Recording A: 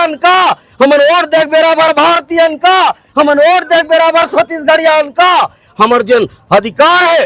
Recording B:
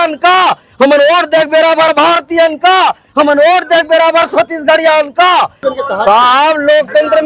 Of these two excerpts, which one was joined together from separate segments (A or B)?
B